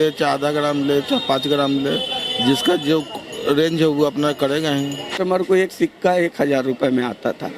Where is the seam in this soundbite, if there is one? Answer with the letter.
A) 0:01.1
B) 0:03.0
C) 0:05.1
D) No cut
C